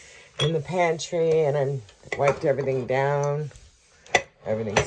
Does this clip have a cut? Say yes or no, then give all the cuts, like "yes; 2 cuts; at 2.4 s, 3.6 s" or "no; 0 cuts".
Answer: no; 0 cuts